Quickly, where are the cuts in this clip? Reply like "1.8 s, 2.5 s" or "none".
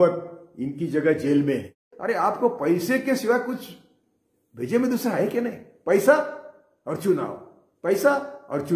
1.9 s